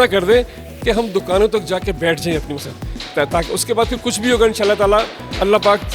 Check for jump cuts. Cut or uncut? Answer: uncut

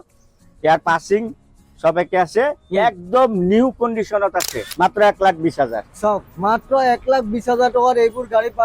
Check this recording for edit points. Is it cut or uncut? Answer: cut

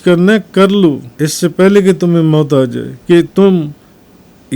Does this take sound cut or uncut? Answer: cut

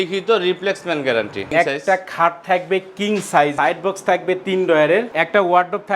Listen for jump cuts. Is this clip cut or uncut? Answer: cut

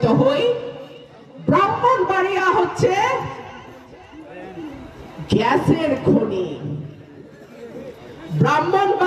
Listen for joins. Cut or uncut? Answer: uncut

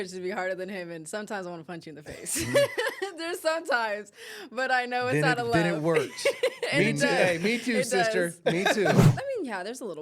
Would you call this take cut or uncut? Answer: cut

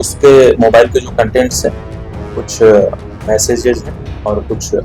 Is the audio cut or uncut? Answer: uncut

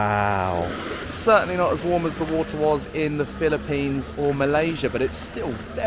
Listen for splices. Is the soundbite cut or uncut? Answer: cut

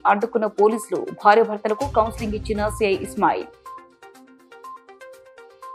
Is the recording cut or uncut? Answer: uncut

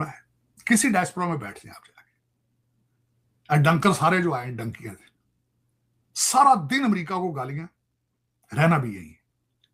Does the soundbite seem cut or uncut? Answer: uncut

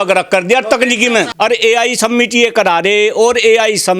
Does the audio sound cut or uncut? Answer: cut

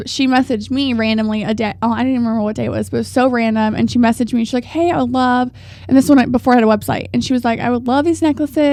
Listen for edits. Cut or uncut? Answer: uncut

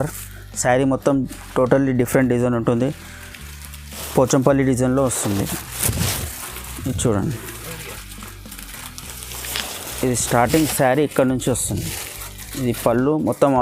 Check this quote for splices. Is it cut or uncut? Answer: uncut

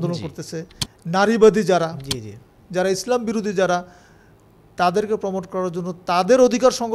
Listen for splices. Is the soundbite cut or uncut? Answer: uncut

